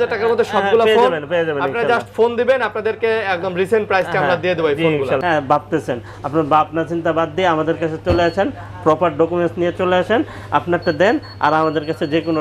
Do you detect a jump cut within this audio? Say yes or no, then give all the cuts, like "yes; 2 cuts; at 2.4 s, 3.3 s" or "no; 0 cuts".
yes; 1 cut; at 5.2 s